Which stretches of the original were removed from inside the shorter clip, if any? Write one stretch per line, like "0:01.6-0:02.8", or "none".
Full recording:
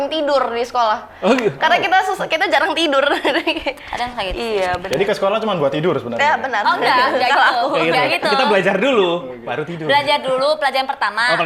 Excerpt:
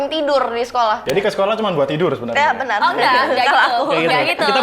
0:01.0-0:04.9